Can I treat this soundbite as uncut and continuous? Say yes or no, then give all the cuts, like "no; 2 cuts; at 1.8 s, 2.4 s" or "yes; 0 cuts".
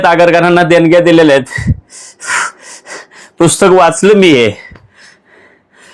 yes; 0 cuts